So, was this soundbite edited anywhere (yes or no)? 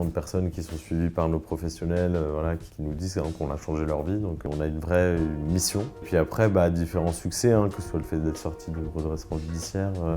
yes